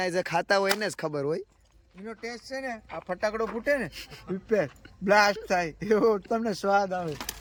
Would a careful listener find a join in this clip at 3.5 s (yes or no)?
no